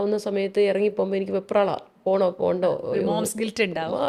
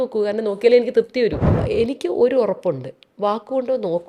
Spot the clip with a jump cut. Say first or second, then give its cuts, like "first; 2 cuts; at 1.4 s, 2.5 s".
second; 1 cut; at 1.5 s